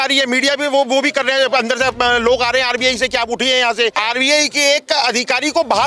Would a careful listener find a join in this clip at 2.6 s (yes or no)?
no